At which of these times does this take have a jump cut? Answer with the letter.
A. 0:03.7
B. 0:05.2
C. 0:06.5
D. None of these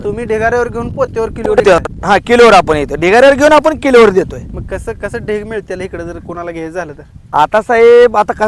D